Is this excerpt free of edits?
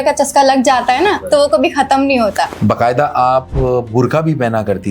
no; 1 cut; at 2.5 s

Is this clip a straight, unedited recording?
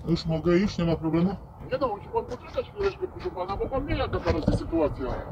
yes; 0 cuts

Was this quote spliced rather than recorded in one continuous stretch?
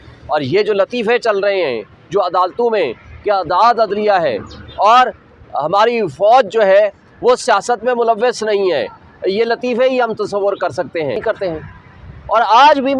yes; 1 cut; at 11.2 s

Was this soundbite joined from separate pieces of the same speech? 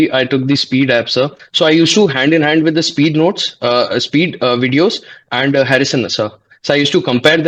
yes; 1 cut; at 1.4 s

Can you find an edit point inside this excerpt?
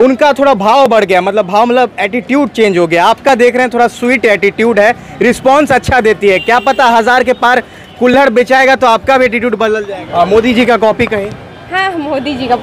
yes; 1 cut; at 9.9 s

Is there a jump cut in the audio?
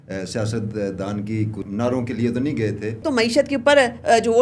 yes; 2 cuts; at 1.6 s, 3.0 s

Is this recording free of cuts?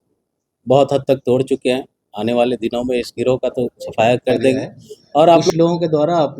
no; 1 cut; at 5.5 s

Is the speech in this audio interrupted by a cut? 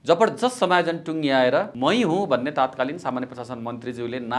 yes; 1 cut; at 1.7 s

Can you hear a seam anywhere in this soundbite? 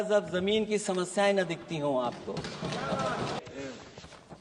yes; 1 cut; at 3.4 s

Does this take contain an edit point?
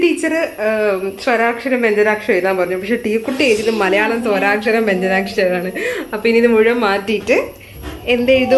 no; 0 cuts

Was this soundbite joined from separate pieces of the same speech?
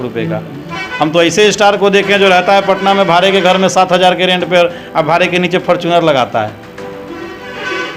no; 0 cuts

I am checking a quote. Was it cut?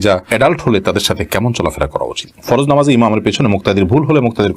yes; 1 cut; at 2.2 s

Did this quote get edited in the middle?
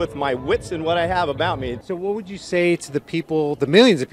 yes; 1 cut; at 1.8 s

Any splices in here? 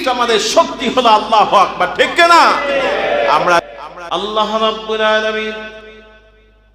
yes; 1 cut; at 3.7 s

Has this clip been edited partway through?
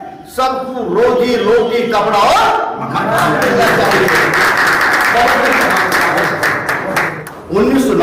no; 0 cuts

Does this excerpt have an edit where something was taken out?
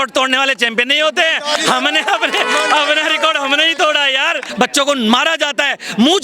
yes; 1 cut; at 4.5 s

